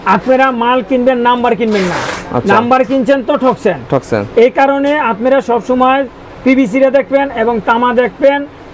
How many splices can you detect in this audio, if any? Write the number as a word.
zero